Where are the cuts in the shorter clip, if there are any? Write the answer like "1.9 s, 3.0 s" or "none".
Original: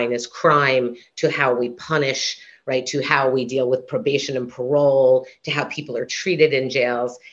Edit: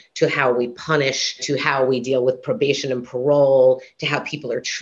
1.4 s